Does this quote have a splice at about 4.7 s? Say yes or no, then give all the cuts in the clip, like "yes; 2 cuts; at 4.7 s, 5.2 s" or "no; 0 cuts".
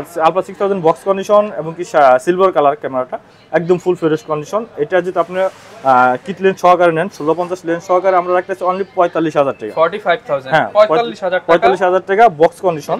no; 0 cuts